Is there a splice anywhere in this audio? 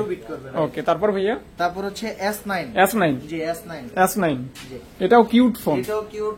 no; 0 cuts

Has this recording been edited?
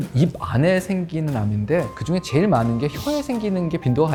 no; 0 cuts

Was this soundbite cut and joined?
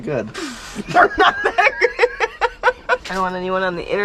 yes; 1 cut; at 3.1 s

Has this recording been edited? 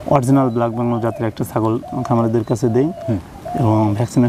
no; 0 cuts

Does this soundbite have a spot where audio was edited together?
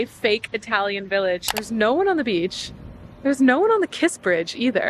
yes; 1 cut; at 1.7 s

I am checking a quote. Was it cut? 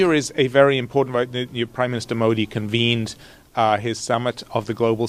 no; 0 cuts

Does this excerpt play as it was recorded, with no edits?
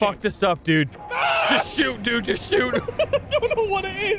no; 2 cuts; at 1.0 s, 2.8 s

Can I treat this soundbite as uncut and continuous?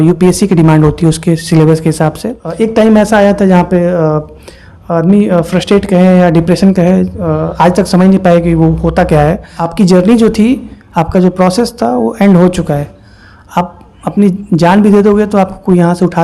no; 2 cuts; at 2.4 s, 9.6 s

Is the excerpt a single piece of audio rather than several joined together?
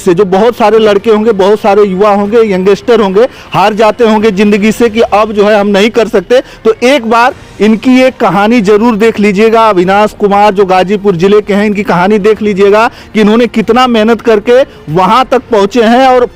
yes; 0 cuts

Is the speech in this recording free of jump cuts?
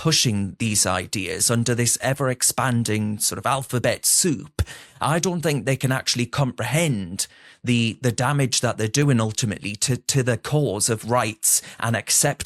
yes; 0 cuts

